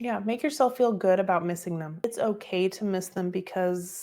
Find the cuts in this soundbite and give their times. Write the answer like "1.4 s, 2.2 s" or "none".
2.1 s